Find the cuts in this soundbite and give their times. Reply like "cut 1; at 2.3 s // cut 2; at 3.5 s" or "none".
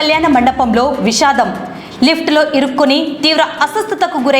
none